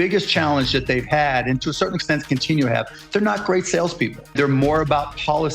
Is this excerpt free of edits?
no; 1 cut; at 4.3 s

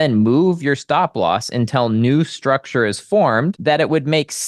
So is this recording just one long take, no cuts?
no; 1 cut; at 3.6 s

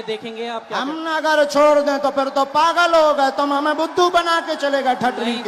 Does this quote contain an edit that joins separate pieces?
no; 0 cuts

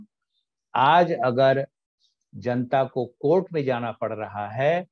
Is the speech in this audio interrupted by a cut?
no; 0 cuts

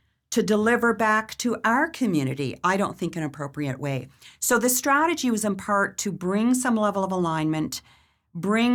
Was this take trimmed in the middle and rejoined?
no; 0 cuts

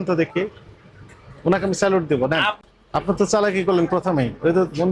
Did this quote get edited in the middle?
yes; 1 cut; at 2.6 s

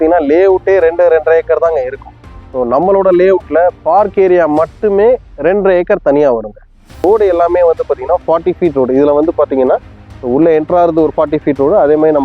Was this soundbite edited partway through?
yes; 1 cut; at 7.0 s

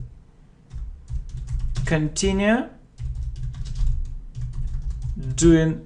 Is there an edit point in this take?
no; 0 cuts

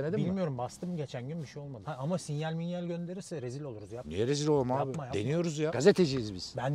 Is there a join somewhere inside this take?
no; 0 cuts

